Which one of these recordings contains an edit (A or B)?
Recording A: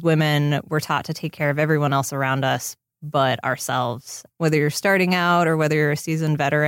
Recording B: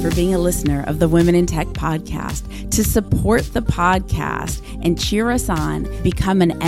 A